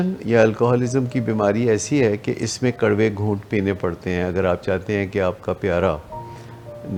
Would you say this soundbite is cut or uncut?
uncut